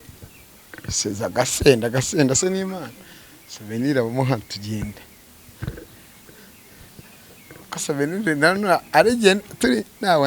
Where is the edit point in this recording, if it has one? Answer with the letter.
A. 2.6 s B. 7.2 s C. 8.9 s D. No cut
D